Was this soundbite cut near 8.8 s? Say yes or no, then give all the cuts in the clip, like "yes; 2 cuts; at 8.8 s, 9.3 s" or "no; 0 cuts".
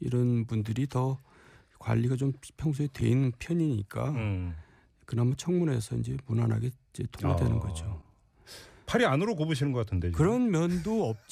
yes; 1 cut; at 8.8 s